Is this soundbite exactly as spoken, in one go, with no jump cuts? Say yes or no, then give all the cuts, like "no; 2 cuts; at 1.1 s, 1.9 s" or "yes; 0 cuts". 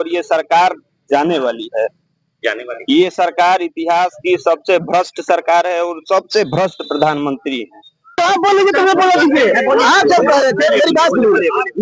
no; 1 cut; at 8.1 s